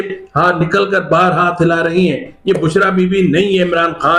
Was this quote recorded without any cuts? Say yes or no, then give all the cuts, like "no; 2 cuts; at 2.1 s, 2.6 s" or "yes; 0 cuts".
yes; 0 cuts